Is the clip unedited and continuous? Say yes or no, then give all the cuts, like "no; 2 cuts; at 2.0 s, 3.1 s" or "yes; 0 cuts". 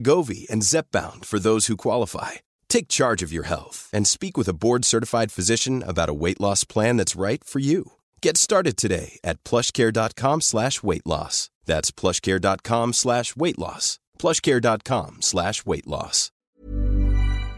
no; 1 cut; at 16.5 s